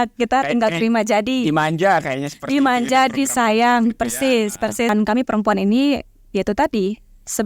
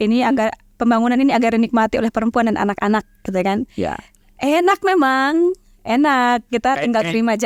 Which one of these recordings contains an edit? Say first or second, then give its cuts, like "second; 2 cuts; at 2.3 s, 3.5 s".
first; 1 cut; at 4.9 s